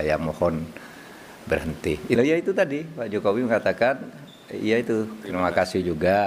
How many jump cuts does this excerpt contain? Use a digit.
1